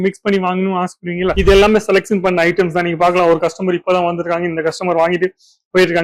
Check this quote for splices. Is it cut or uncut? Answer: cut